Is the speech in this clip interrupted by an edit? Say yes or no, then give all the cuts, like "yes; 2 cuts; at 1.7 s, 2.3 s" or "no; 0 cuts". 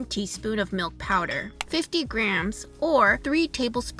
yes; 2 cuts; at 1.6 s, 3.2 s